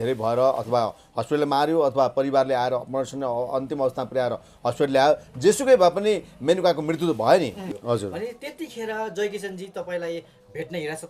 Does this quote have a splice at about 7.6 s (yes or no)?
yes